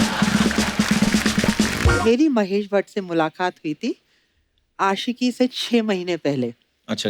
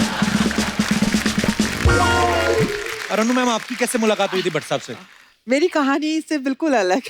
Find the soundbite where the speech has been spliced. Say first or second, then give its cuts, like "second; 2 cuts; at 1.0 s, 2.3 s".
first; 1 cut; at 2.0 s